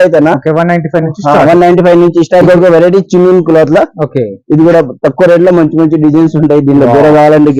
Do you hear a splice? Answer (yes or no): yes